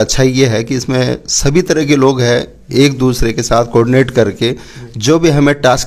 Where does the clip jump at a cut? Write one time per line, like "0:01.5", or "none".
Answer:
none